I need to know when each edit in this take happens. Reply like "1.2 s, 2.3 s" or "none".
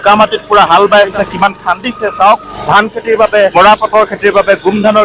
1.1 s, 2.5 s, 3.5 s